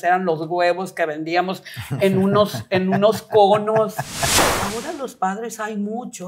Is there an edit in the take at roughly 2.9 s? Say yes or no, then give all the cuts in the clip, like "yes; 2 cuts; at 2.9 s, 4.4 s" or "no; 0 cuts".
no; 1 cut; at 4.4 s